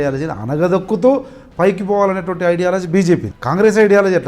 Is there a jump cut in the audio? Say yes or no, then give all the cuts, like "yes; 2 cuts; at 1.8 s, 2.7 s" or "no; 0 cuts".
yes; 1 cut; at 3.3 s